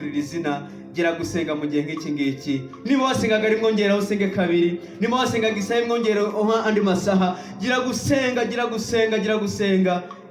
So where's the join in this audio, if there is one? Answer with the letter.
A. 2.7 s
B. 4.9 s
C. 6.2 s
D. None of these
D